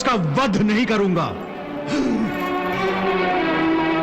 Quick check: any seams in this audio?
no; 0 cuts

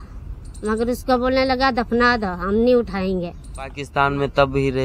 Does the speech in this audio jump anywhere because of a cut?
yes; 1 cut; at 3.8 s

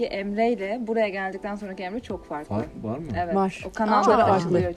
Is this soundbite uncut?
yes; 0 cuts

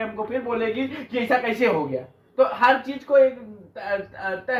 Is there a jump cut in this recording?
no; 0 cuts

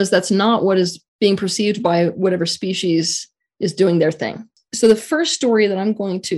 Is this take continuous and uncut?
no; 2 cuts; at 1.0 s, 4.6 s

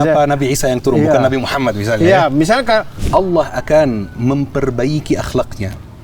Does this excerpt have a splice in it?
yes; 1 cut; at 2.9 s

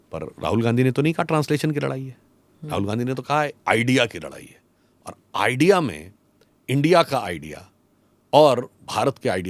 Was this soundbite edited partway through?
no; 0 cuts

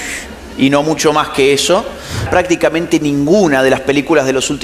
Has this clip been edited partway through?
yes; 1 cut; at 2.2 s

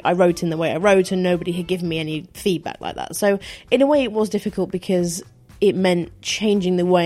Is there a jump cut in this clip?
no; 0 cuts

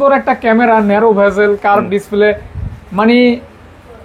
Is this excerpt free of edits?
yes; 0 cuts

